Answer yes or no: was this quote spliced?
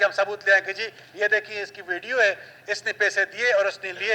no